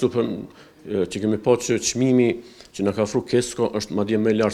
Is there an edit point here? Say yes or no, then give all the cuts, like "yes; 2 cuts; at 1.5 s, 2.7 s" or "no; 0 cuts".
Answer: no; 0 cuts